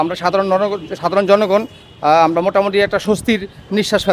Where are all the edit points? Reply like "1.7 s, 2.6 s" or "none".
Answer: none